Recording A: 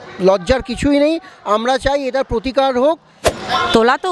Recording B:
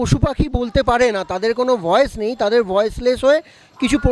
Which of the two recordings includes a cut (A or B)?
A